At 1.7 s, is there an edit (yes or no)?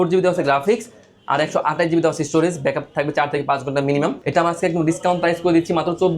no